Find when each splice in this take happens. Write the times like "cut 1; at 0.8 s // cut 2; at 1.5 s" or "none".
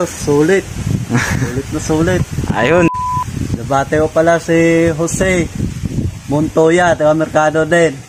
cut 1; at 2.9 s

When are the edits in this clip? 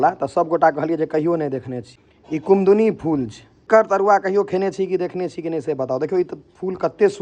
cut 1; at 1.8 s // cut 2; at 3.6 s

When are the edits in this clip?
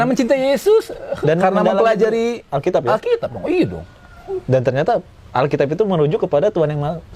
none

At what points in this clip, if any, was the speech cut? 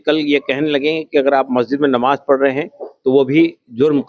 none

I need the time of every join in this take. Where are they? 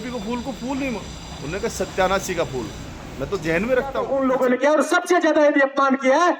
cut 1; at 3.9 s

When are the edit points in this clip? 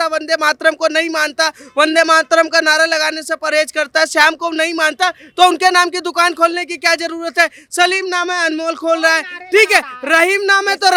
none

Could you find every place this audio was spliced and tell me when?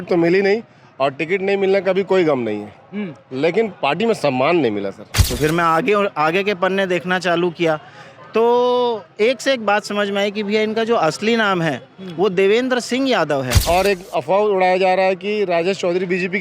cut 1; at 5.2 s // cut 2; at 13.6 s

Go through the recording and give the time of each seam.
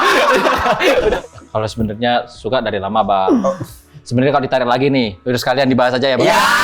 cut 1; at 1.2 s

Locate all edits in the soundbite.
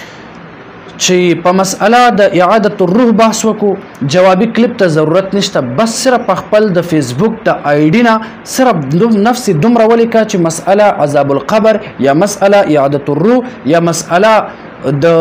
none

